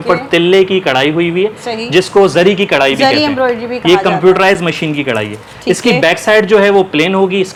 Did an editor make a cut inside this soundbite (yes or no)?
no